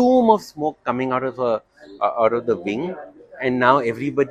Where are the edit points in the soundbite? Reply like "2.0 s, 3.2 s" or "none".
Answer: none